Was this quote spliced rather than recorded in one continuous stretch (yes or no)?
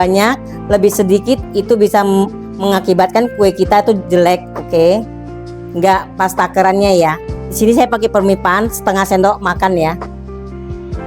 yes